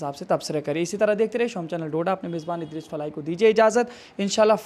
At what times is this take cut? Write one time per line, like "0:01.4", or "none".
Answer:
none